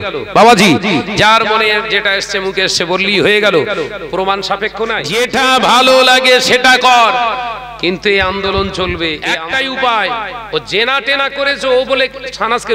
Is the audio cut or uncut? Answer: cut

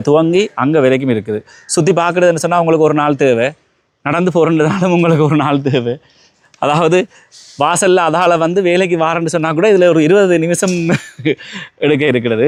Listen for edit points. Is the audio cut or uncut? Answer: uncut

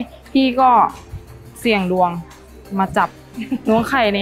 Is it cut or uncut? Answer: uncut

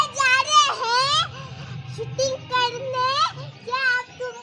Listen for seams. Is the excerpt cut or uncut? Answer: uncut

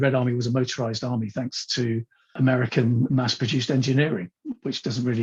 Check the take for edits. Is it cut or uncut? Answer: uncut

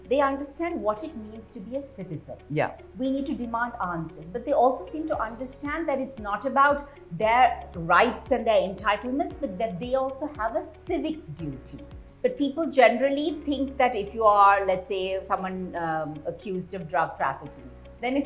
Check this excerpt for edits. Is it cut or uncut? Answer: cut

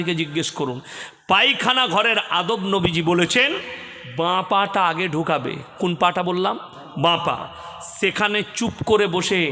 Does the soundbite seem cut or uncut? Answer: uncut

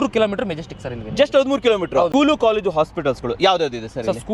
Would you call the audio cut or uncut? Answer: cut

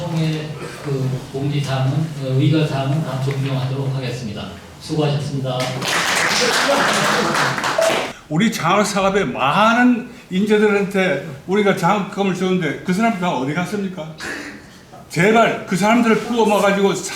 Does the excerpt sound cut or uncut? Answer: cut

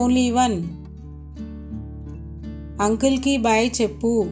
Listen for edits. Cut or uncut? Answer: cut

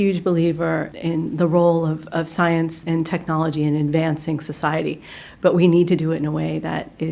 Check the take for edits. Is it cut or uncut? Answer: cut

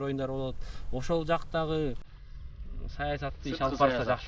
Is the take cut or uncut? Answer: uncut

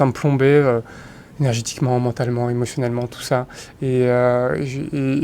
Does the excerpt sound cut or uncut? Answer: uncut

